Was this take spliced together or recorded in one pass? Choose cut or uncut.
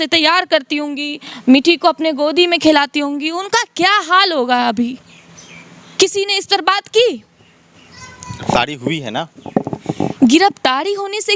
uncut